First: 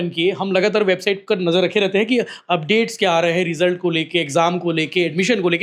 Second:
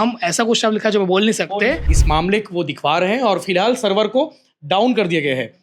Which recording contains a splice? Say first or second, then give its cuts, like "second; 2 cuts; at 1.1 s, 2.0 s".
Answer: second; 1 cut; at 2.0 s